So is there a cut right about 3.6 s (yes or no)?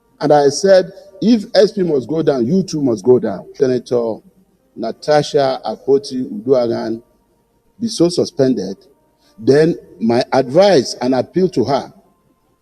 yes